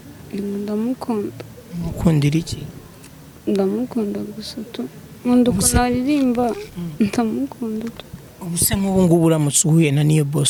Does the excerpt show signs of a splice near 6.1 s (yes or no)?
no